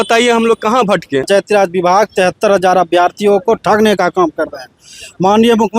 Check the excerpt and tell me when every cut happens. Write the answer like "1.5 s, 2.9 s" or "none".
1.2 s